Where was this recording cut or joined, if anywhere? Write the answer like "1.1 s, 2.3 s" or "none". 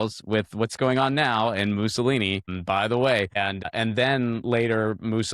2.5 s, 3.7 s